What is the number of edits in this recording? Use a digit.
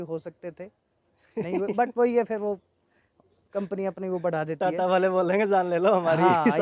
0